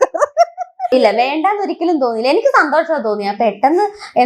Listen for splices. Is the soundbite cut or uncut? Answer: cut